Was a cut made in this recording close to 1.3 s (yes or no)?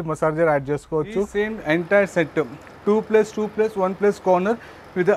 yes